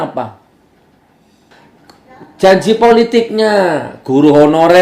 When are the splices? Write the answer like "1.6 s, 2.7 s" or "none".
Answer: 1.5 s